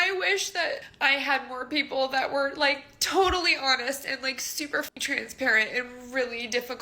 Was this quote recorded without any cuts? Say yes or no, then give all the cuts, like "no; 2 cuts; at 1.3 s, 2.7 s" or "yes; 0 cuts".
no; 1 cut; at 5.0 s